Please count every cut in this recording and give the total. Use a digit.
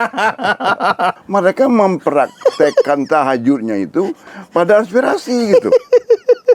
1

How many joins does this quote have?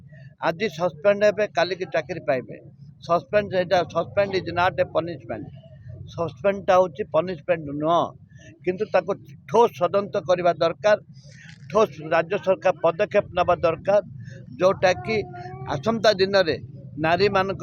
0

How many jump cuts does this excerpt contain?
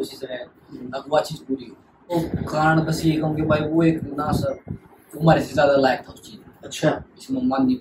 1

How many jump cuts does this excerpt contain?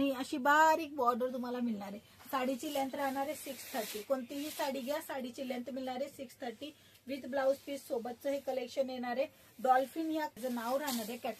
1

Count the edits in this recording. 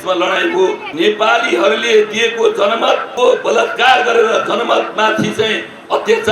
2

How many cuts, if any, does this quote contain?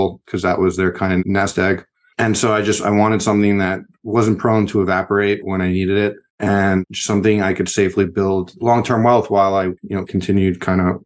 1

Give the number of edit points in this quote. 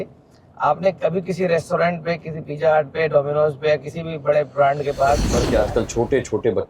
1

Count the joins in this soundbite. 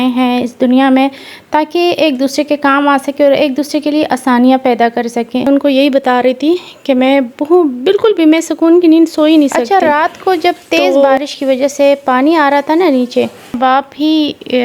3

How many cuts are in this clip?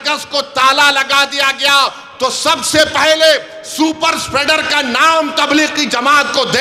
0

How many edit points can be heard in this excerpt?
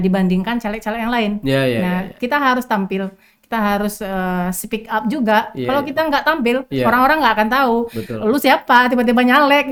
0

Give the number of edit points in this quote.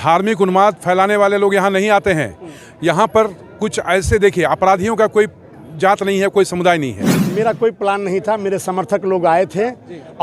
1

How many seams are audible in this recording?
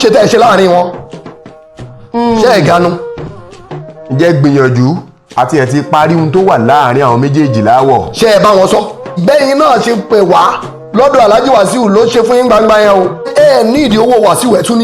2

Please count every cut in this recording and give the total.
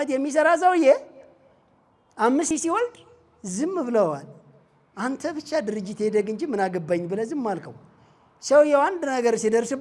1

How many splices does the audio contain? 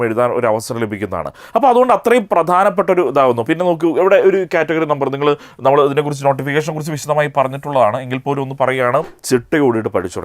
1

